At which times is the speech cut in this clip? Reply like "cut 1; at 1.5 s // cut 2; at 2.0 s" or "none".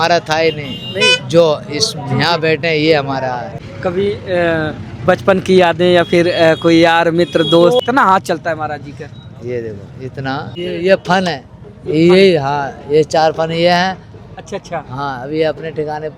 cut 1; at 3.5 s // cut 2; at 7.8 s // cut 3; at 10.5 s